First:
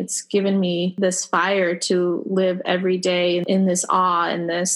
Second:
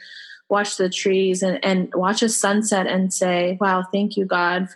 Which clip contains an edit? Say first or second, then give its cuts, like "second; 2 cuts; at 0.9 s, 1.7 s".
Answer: first; 2 cuts; at 0.9 s, 3.4 s